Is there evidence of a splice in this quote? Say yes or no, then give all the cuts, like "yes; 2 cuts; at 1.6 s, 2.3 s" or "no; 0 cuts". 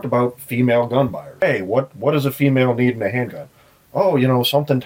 yes; 1 cut; at 1.3 s